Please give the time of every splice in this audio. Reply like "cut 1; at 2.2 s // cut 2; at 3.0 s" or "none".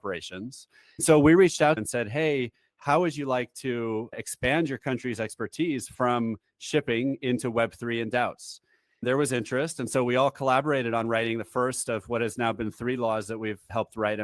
cut 1; at 1.0 s // cut 2; at 1.8 s